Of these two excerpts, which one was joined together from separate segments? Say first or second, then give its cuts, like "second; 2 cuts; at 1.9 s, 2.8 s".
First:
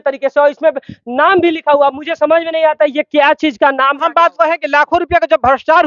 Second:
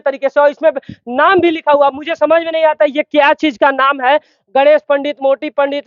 first; 1 cut; at 4.0 s